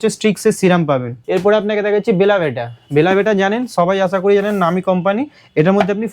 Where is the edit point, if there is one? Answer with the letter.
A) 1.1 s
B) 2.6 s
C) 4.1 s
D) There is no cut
A